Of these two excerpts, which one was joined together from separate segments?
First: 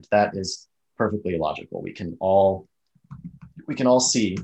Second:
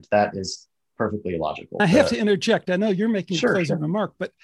second; 1 cut; at 1.8 s

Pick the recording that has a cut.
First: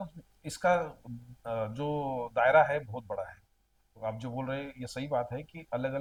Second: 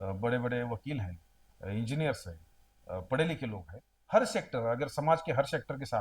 second; 1 cut; at 3.9 s

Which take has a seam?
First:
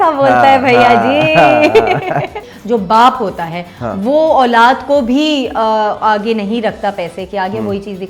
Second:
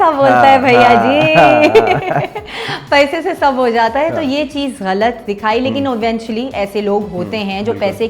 first; 1 cut; at 2.5 s

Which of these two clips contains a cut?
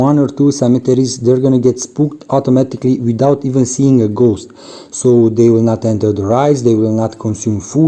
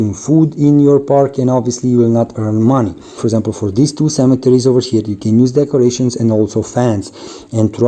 second; 1 cut; at 3.2 s

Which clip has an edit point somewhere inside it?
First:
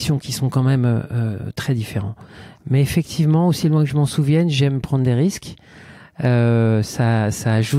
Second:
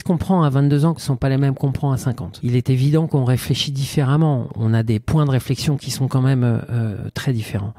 second; 3 cuts; at 1.0 s, 2.3 s, 4.5 s

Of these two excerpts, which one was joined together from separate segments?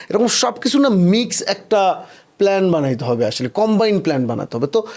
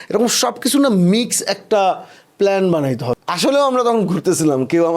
second; 1 cut; at 3.1 s

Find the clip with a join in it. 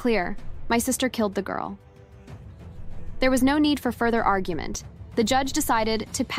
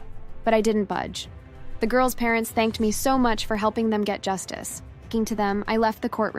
second; 1 cut; at 5.1 s

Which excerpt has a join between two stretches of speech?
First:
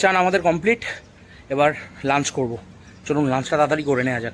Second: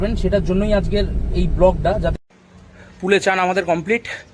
second; 1 cut; at 2.1 s

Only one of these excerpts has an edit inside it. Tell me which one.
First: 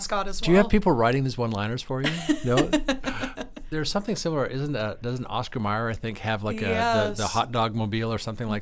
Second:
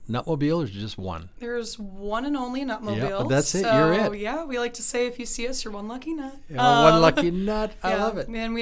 first; 1 cut; at 3.6 s

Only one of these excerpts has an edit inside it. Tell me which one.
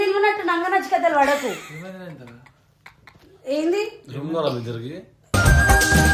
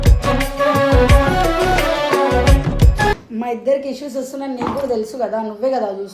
second; 1 cut; at 3.2 s

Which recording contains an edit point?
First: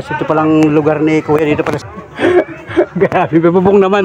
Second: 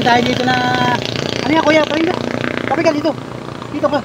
first; 1 cut; at 1.8 s

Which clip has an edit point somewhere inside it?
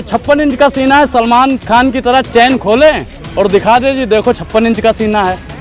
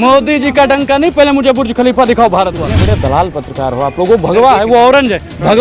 second; 1 cut; at 2.7 s

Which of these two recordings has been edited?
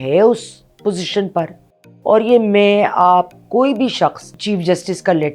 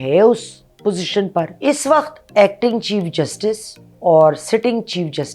second; 1 cut; at 1.5 s

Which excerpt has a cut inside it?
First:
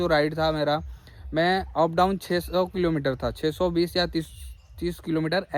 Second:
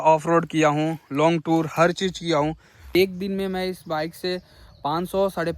second; 1 cut; at 2.8 s

